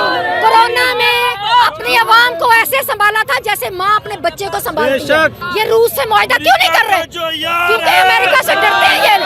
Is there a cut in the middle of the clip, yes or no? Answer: yes